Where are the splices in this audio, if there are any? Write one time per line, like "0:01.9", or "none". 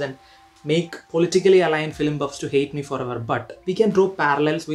0:03.5